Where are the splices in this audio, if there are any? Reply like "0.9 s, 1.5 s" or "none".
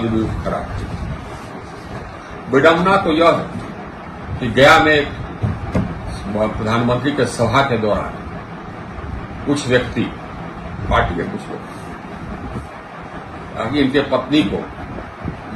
none